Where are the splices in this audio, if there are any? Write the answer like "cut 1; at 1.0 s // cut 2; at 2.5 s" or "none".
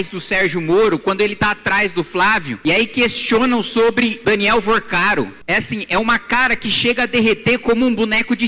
cut 1; at 2.5 s // cut 2; at 4.2 s // cut 3; at 5.4 s